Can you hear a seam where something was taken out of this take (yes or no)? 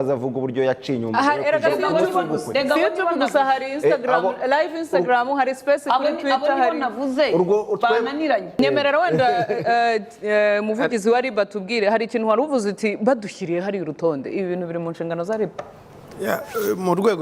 yes